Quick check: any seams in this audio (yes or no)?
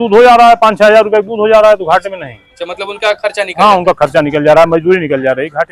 no